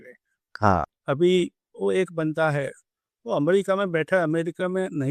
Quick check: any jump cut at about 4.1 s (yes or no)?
no